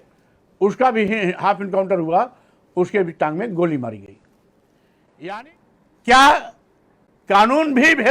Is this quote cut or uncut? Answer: cut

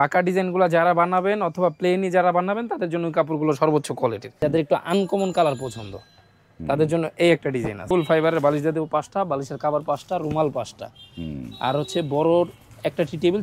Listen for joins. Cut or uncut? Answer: cut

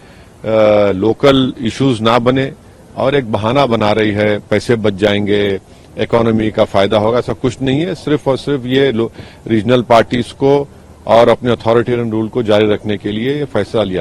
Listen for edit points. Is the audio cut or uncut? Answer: uncut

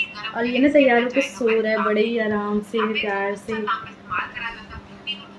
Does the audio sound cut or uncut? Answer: uncut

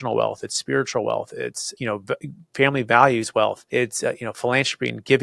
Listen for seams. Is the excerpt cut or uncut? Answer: cut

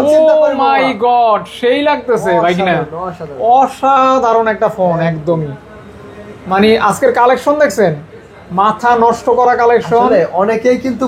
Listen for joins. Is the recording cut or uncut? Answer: uncut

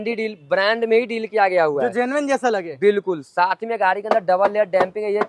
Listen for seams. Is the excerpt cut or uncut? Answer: uncut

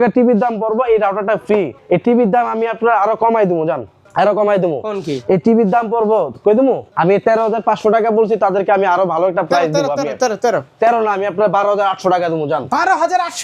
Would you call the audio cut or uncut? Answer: cut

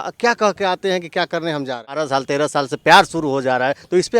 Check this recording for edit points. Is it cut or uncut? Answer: cut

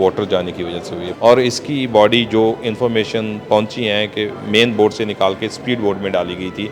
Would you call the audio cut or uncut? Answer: cut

